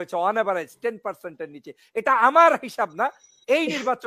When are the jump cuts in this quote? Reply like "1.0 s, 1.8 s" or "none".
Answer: none